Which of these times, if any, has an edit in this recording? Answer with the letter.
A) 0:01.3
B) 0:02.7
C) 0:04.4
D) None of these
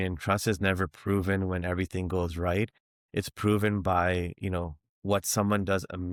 D